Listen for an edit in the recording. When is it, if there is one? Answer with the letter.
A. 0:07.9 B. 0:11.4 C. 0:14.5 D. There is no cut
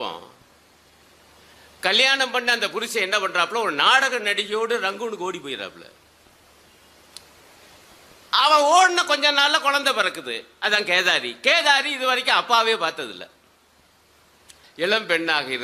C